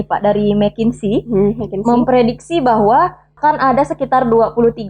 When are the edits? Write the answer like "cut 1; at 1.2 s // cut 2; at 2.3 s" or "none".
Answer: cut 1; at 3.3 s